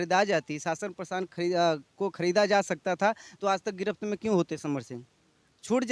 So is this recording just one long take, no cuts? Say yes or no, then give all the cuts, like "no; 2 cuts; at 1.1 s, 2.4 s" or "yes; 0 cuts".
yes; 0 cuts